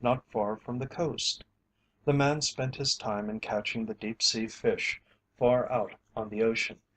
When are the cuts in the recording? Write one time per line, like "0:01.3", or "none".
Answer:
none